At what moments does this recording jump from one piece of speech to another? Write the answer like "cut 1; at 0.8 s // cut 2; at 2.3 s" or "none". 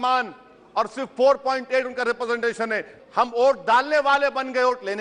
cut 1; at 2.9 s